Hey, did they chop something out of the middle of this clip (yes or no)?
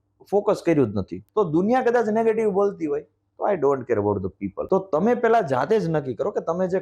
yes